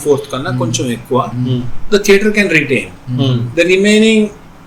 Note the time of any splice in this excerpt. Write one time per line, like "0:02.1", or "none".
none